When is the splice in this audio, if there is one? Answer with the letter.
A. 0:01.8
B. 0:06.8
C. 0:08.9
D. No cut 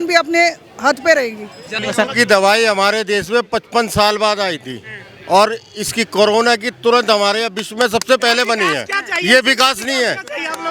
A